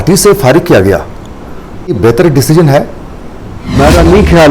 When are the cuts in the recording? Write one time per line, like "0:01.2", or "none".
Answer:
0:01.9
0:03.7